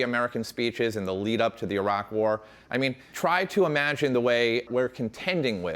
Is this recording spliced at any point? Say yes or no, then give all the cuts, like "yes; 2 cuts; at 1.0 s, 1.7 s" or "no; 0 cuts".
yes; 2 cuts; at 3.0 s, 4.7 s